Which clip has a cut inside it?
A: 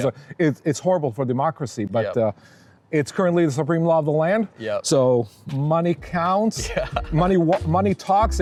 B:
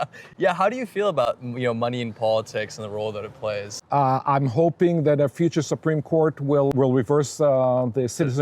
B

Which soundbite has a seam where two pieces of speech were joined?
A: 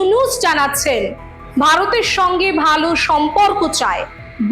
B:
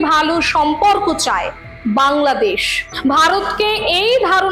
B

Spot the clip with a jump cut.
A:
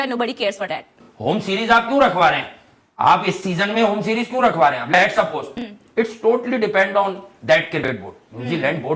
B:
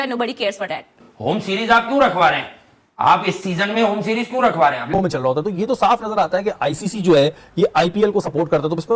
B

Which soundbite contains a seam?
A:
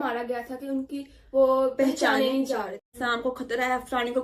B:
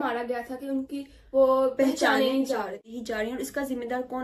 A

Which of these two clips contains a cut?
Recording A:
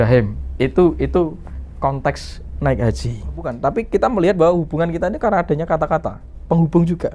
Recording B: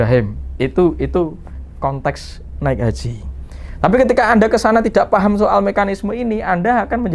A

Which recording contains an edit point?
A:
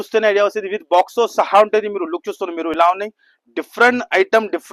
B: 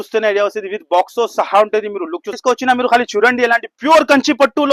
B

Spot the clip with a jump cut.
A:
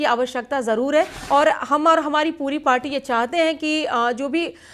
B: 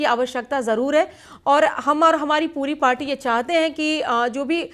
A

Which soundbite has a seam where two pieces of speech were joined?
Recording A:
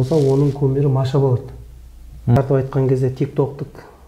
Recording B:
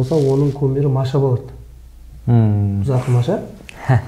A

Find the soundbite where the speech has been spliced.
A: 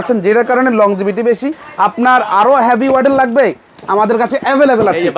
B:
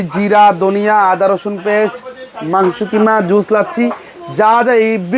A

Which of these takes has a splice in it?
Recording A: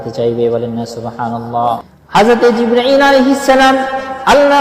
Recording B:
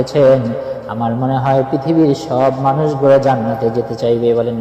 A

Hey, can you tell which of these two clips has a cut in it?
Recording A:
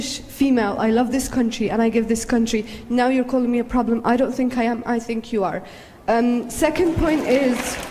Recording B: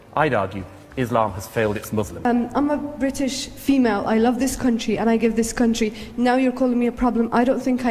B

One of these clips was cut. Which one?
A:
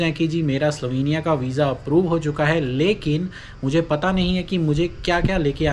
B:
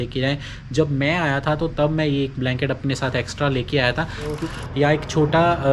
B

